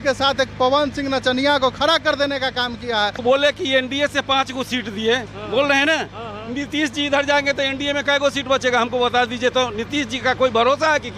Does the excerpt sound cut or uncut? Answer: cut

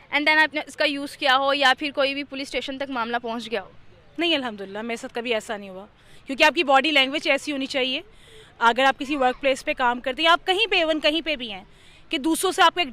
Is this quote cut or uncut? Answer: uncut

